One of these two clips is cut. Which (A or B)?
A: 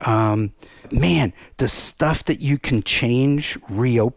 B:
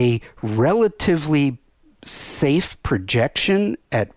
A